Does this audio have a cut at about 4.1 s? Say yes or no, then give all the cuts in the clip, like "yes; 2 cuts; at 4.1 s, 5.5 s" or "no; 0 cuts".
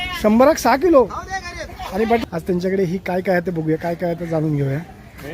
no; 1 cut; at 2.2 s